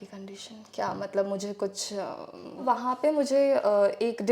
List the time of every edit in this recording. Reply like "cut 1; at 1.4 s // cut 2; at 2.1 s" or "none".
cut 1; at 2.6 s